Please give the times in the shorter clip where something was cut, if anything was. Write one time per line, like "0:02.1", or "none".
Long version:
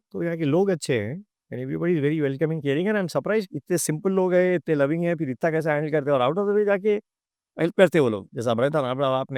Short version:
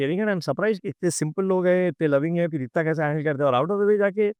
none